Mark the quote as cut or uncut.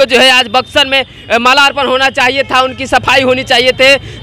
uncut